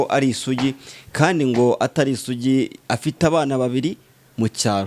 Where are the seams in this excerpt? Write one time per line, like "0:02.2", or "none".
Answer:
none